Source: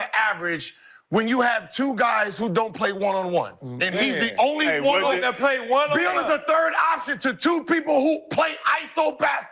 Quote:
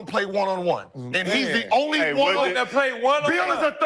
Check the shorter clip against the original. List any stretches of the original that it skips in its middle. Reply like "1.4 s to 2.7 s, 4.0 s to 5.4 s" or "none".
none

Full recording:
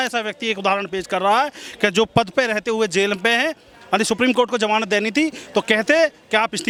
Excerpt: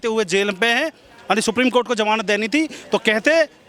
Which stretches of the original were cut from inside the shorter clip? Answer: none

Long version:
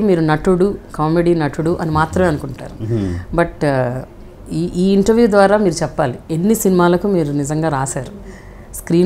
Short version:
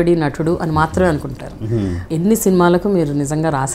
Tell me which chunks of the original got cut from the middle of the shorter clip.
3.2 s to 6.2 s

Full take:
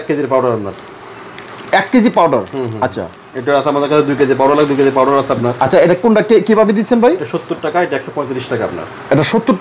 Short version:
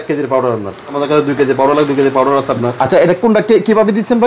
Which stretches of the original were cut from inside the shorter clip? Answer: 0.9 s to 3.7 s

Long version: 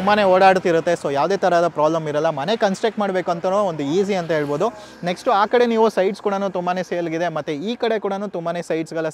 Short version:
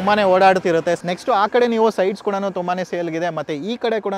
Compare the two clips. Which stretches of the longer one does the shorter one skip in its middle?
1.0 s to 5.0 s

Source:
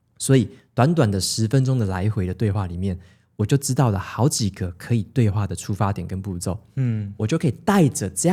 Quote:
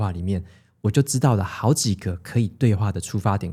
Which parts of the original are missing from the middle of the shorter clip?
none

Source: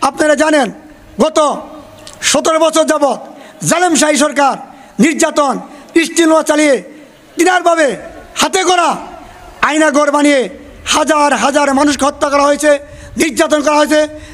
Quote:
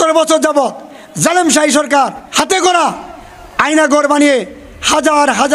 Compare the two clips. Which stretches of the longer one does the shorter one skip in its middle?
4.7 s to 8.3 s

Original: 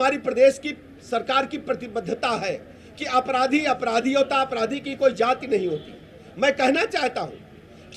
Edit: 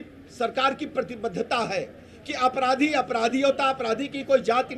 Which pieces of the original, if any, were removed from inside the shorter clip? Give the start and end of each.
none

